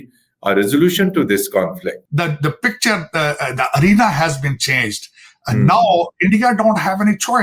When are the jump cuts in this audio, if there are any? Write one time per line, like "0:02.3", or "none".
0:02.0

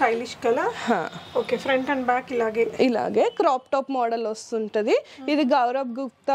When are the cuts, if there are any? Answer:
none

